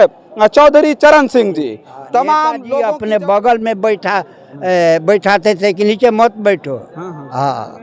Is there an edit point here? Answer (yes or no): yes